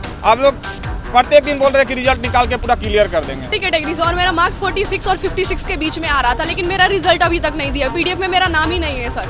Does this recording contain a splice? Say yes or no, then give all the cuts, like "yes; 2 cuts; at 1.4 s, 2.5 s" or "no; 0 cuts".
yes; 1 cut; at 3.5 s